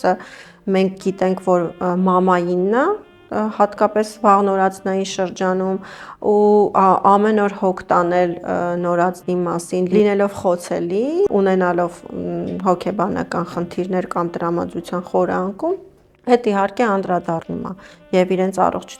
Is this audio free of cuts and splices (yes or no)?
yes